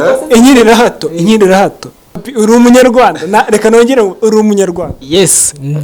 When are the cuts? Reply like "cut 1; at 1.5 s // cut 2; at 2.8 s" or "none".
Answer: cut 1; at 2.3 s